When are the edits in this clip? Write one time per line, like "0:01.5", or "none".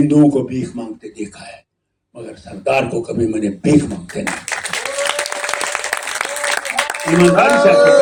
none